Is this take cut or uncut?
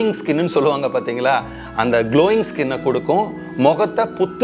uncut